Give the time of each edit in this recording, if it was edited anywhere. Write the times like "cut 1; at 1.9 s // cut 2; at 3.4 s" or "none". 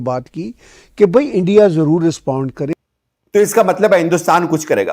cut 1; at 2.7 s

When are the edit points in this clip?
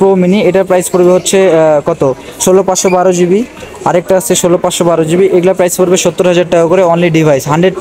none

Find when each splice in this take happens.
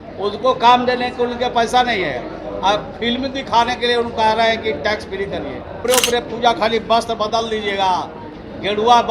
cut 1; at 5.8 s

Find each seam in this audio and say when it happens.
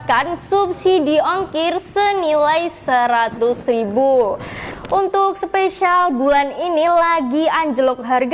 cut 1; at 4.6 s

